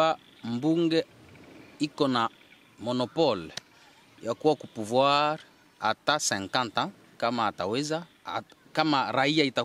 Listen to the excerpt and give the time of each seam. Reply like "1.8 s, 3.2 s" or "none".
none